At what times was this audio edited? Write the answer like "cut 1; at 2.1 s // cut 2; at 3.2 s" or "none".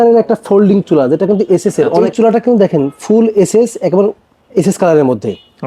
cut 1; at 2.0 s

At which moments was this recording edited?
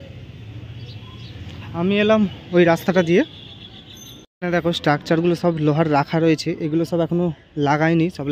cut 1; at 4.3 s

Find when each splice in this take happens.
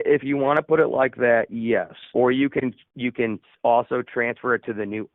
none

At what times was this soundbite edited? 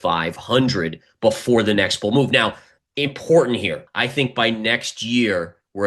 cut 1; at 3.8 s

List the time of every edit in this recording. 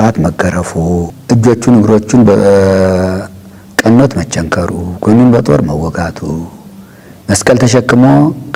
cut 1; at 1.1 s

